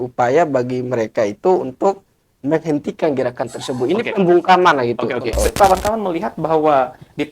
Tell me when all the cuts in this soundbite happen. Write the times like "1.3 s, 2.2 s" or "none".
5.5 s

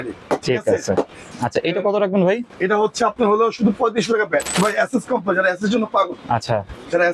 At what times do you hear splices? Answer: 1.3 s, 4.5 s

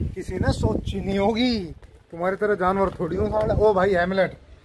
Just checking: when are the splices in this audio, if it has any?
none

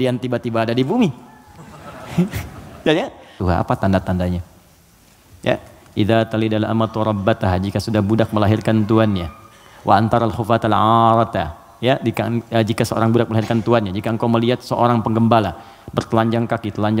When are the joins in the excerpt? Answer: 3.4 s

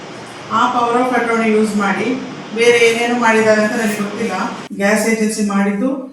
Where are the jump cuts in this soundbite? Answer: 4.6 s

